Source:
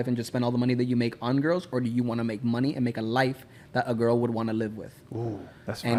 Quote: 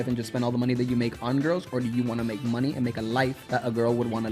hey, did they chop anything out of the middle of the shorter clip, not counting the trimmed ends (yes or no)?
yes